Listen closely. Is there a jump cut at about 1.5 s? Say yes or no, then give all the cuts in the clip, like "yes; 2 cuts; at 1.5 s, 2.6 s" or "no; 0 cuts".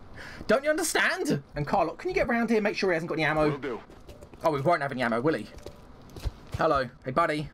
yes; 1 cut; at 1.5 s